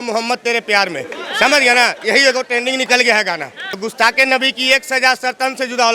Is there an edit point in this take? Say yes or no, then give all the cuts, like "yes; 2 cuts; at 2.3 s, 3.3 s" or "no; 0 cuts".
no; 0 cuts